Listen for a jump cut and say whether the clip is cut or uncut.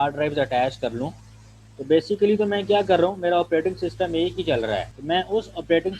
cut